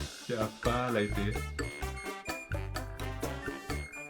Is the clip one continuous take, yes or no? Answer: no